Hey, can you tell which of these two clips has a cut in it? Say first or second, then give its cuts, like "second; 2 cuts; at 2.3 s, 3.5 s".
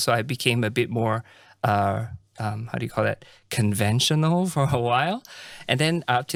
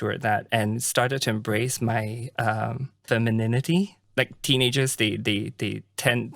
second; 2 cuts; at 3.0 s, 4.0 s